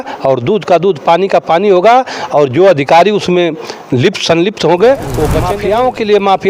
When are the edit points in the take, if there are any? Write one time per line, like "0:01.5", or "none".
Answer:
0:05.4